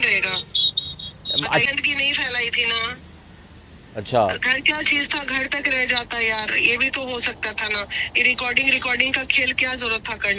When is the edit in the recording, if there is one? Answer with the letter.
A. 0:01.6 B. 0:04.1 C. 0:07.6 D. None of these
A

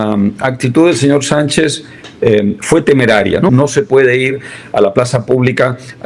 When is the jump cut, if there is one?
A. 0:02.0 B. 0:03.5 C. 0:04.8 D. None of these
B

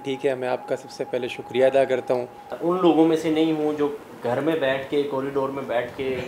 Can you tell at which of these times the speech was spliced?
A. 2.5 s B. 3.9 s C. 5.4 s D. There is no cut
A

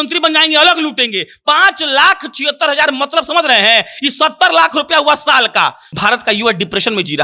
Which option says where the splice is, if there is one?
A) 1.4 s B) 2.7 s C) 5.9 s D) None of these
C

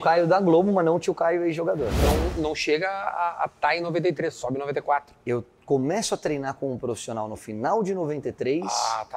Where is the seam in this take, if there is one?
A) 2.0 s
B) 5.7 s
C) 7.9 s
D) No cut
A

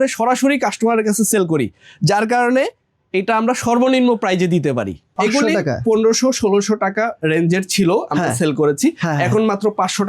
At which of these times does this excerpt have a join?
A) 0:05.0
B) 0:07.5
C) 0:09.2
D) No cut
A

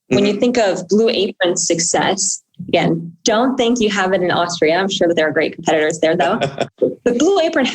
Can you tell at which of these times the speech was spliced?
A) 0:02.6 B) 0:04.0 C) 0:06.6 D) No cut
C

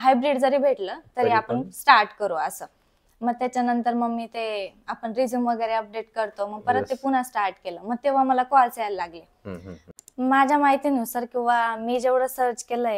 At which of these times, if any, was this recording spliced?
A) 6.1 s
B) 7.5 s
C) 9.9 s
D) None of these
C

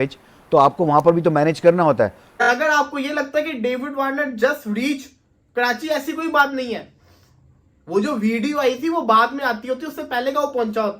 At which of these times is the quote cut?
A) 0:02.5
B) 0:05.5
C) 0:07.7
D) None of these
A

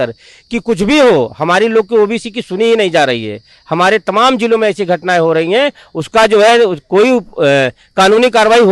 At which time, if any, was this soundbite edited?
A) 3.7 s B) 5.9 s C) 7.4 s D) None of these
D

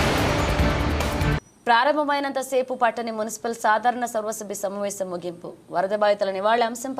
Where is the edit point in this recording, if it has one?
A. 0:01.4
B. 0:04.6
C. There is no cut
A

